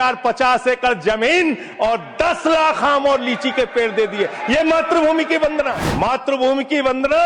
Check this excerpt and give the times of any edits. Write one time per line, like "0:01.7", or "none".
0:05.8